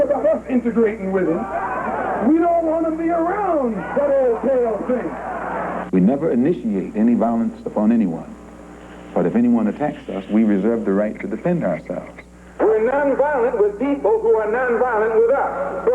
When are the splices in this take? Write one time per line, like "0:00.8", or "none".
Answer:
0:05.8
0:12.6